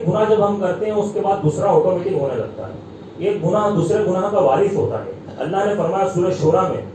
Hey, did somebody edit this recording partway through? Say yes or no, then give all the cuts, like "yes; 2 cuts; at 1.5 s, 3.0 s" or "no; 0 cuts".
no; 0 cuts